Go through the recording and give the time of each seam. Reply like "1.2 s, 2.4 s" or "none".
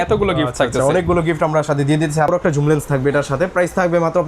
2.3 s